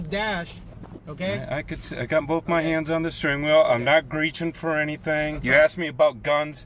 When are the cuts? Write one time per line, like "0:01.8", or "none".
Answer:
0:05.4